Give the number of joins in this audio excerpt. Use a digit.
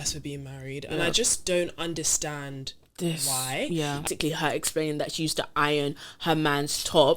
1